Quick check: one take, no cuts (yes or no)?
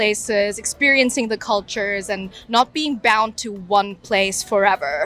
yes